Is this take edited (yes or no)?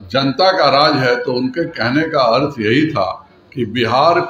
no